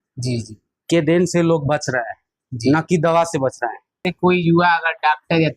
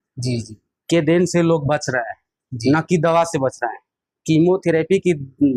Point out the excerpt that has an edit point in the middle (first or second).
first